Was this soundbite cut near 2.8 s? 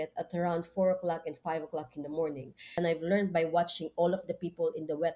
yes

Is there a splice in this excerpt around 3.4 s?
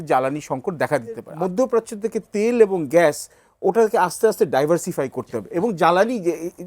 no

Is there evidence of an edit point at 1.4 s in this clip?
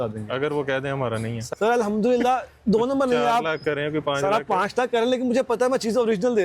yes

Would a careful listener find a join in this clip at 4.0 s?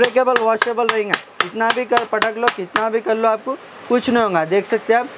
no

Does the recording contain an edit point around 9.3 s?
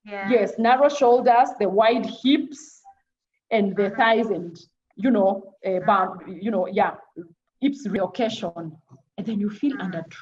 no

